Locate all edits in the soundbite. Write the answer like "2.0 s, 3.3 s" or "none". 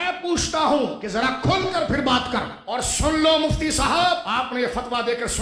1.0 s, 2.6 s, 4.3 s